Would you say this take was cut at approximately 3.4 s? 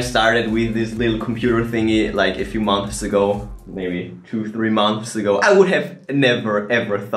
no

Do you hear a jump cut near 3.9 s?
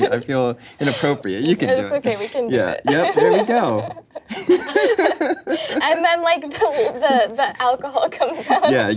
no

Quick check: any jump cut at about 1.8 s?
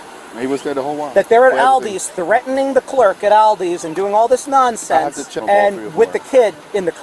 no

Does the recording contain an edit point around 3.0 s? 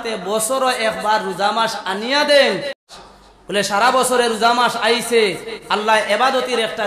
yes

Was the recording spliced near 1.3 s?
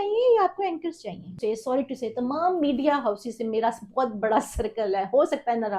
yes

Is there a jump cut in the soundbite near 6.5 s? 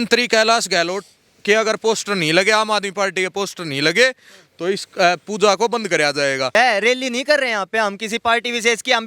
yes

